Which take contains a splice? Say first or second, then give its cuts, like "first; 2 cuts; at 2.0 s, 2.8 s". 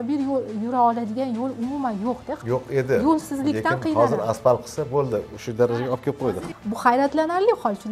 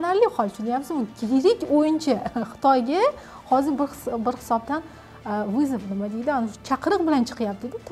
first; 2 cuts; at 2.4 s, 6.2 s